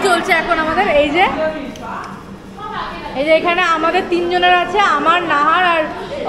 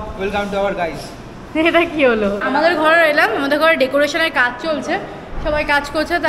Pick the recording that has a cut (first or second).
second